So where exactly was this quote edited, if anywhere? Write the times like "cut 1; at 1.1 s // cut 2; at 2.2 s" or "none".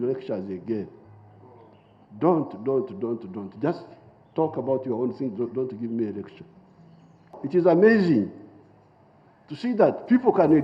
cut 1; at 7.4 s